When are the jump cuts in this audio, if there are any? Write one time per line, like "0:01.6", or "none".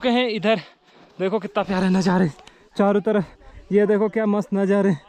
none